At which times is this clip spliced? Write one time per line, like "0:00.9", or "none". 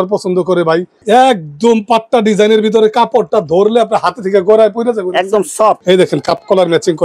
0:00.9
0:05.8